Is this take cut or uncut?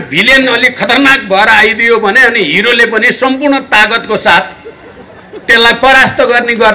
uncut